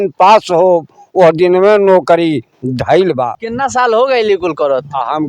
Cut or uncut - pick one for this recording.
cut